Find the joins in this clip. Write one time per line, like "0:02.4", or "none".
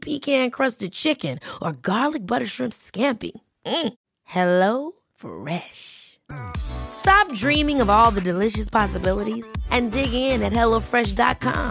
none